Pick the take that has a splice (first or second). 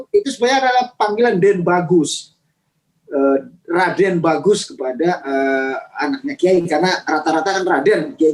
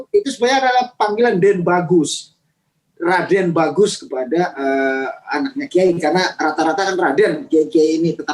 second